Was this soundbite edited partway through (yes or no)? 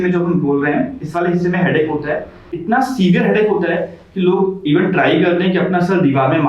yes